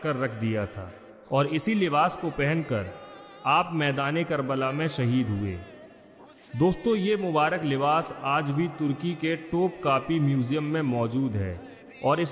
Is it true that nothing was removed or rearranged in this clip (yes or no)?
yes